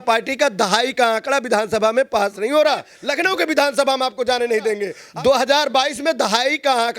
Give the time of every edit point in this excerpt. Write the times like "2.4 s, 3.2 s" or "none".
3.0 s, 4.9 s